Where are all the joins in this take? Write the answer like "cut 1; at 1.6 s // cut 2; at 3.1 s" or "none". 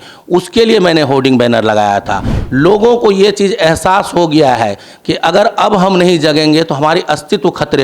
cut 1; at 2.4 s